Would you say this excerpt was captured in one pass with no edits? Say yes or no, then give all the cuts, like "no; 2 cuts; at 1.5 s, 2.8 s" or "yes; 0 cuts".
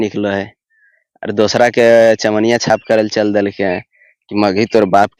yes; 0 cuts